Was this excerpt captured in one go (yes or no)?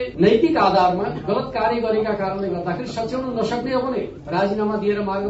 no